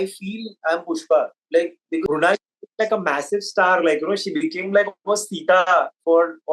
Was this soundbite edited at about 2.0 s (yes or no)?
yes